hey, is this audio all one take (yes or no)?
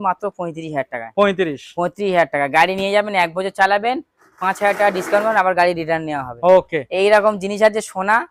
yes